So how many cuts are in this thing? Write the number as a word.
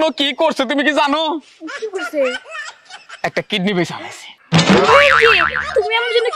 zero